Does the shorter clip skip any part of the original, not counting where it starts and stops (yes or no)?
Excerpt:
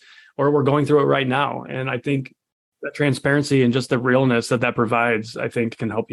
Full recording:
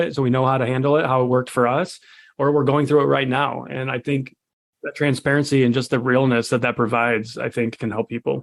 no